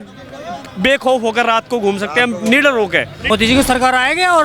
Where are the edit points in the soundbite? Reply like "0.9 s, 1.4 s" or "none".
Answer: 3.3 s